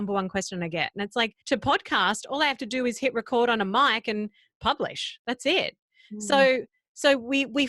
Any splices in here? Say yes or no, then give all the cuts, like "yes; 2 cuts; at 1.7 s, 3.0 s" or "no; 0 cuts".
yes; 1 cut; at 1.4 s